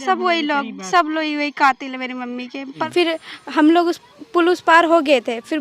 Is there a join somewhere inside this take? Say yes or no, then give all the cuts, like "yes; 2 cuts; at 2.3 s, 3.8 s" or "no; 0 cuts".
yes; 1 cut; at 2.8 s